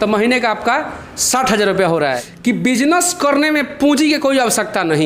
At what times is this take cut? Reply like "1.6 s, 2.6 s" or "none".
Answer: 2.3 s

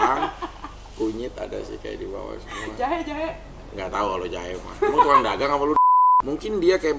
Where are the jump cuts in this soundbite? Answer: 5.9 s

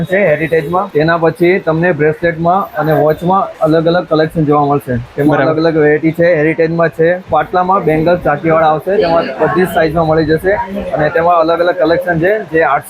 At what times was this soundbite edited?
0.9 s, 3.5 s, 7.2 s

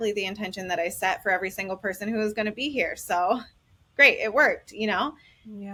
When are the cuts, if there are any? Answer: none

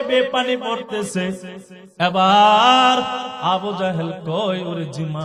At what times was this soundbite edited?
none

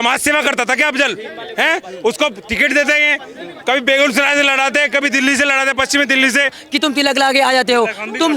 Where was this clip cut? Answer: 6.6 s

